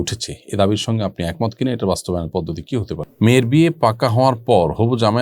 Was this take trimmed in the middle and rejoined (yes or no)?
yes